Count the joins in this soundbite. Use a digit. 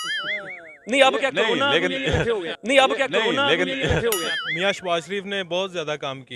2